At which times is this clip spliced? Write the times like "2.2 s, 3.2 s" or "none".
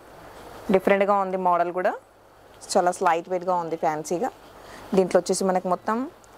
none